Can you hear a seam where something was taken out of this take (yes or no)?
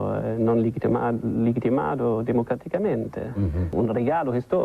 yes